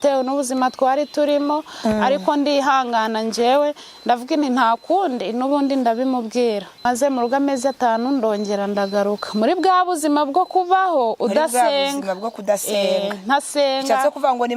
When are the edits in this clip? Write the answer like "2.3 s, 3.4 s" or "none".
6.8 s